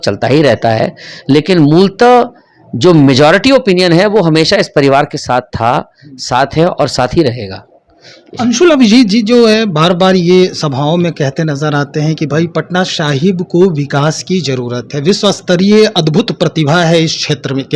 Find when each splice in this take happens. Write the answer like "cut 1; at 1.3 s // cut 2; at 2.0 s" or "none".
none